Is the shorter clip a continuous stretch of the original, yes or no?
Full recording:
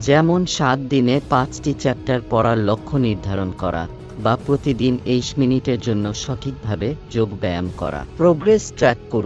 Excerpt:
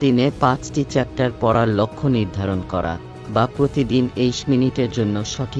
yes